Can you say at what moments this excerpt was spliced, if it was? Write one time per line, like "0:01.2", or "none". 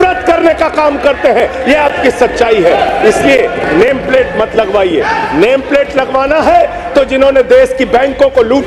none

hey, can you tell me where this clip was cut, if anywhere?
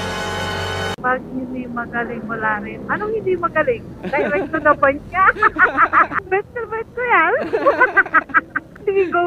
0:00.9

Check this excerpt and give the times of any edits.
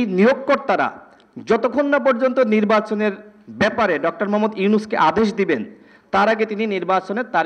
none

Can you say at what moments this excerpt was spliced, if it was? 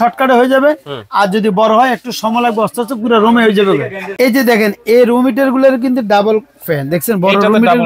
none

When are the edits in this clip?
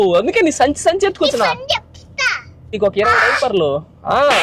0:02.8

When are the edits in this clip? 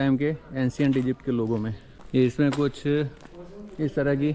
none

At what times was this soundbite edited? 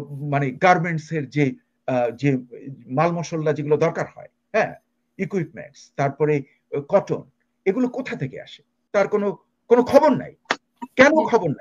0:08.8

